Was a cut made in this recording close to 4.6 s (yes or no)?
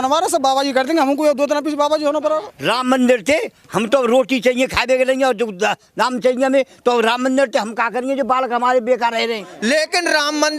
no